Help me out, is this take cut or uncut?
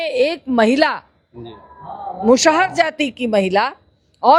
uncut